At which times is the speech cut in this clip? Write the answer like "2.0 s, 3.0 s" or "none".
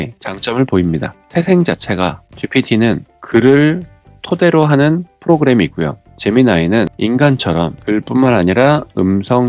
6.9 s, 7.8 s